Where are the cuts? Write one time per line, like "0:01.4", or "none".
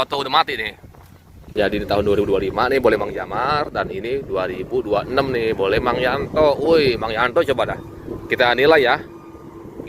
0:01.5